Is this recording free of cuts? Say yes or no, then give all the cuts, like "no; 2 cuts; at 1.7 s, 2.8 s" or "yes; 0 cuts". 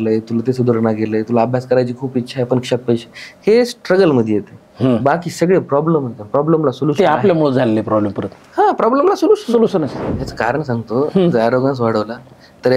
no; 1 cut; at 10.0 s